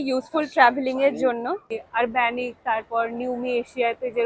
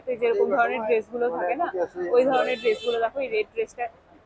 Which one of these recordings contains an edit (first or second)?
first